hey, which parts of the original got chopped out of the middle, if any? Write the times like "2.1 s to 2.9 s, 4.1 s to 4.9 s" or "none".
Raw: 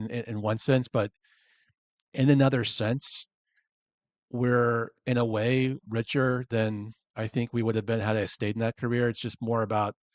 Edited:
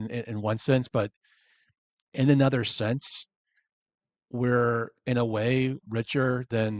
none